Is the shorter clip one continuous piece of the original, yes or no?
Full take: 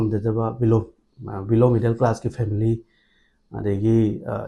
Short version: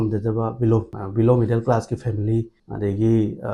no